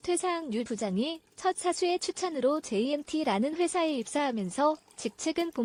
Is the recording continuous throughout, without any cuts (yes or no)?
yes